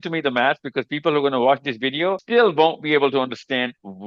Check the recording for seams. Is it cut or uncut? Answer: cut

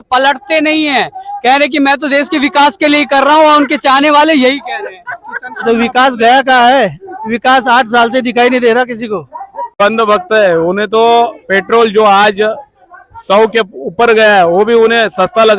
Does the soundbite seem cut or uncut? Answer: cut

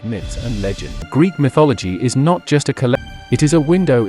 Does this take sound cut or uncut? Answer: cut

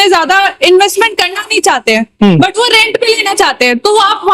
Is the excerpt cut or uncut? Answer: uncut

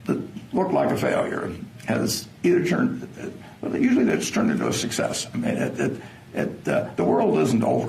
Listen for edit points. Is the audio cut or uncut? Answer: uncut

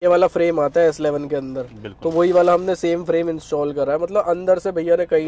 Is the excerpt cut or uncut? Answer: uncut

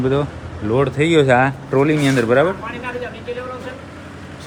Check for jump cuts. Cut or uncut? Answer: uncut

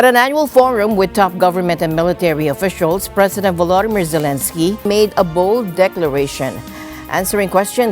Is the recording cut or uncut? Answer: cut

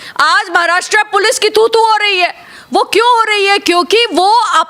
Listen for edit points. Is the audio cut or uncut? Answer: uncut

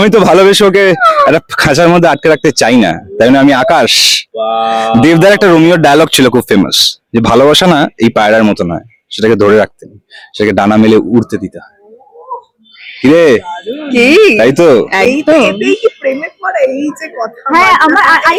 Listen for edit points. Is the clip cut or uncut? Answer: uncut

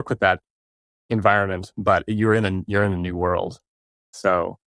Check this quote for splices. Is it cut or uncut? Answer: uncut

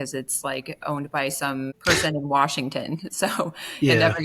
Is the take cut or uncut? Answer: cut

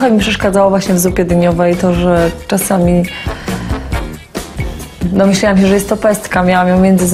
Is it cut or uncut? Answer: uncut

